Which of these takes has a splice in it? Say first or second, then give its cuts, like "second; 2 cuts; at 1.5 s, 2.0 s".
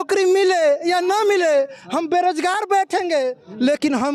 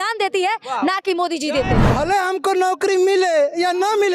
second; 1 cut; at 1.8 s